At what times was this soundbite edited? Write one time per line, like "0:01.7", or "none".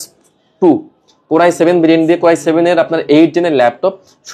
none